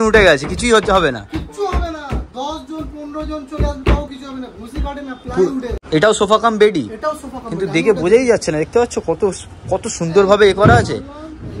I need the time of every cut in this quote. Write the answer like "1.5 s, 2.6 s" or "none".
5.8 s